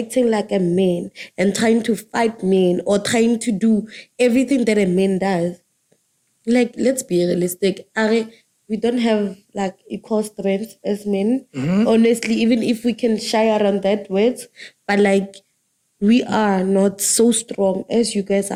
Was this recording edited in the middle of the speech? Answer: no; 0 cuts

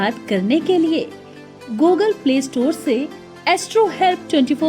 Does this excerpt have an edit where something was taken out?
yes; 1 cut; at 1.9 s

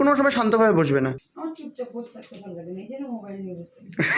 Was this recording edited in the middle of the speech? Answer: yes; 1 cut; at 1.2 s

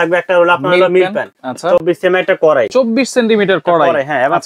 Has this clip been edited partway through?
no; 0 cuts

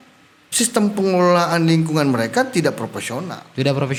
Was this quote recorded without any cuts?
yes; 0 cuts

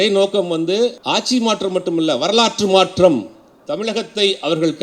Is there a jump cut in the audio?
yes; 1 cut; at 1.0 s

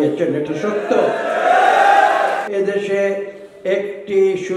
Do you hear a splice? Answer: yes; 1 cut; at 2.5 s

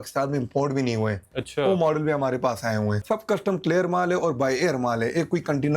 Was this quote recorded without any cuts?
no; 2 cuts; at 1.3 s, 3.0 s

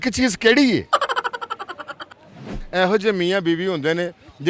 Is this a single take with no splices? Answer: no; 2 cuts; at 0.9 s, 2.6 s

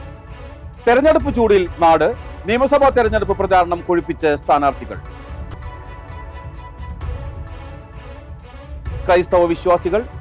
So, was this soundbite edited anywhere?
no; 0 cuts

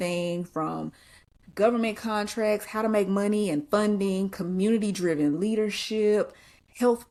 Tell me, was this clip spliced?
no; 0 cuts

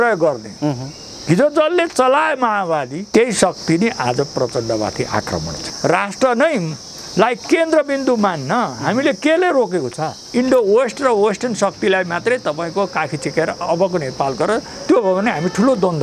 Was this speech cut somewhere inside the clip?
yes; 3 cuts; at 3.0 s, 5.6 s, 10.2 s

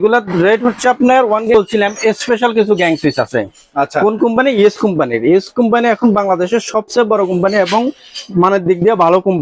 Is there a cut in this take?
yes; 1 cut; at 1.7 s

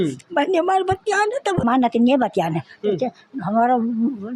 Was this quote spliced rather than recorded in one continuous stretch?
yes; 1 cut; at 1.6 s

